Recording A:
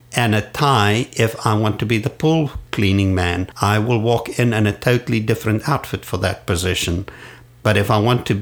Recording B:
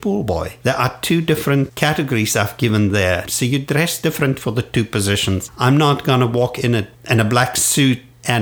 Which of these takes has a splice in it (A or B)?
B